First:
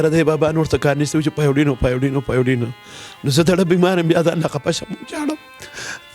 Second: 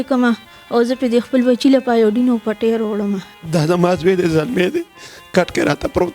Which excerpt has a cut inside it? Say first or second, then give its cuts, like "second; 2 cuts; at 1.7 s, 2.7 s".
second; 1 cut; at 3.3 s